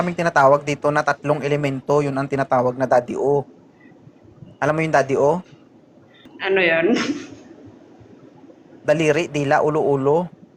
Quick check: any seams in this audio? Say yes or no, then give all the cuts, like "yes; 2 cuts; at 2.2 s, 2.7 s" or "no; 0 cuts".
yes; 1 cut; at 6.3 s